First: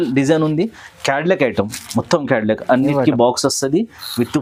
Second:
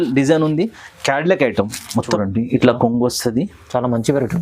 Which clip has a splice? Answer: second; 1 cut; at 2.2 s

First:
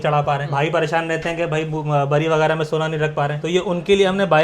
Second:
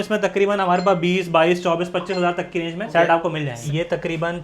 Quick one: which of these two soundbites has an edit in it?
second; 2 cuts; at 2.8 s, 3.7 s

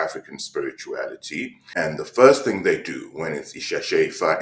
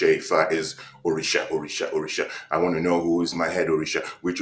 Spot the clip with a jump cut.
first; 1 cut; at 1.6 s

